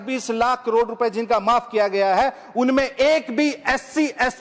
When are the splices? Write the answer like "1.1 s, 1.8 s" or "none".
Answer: none